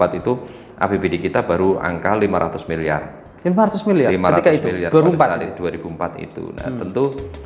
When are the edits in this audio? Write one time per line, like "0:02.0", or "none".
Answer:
none